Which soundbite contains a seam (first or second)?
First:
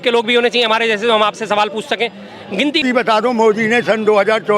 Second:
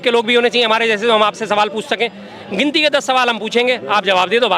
first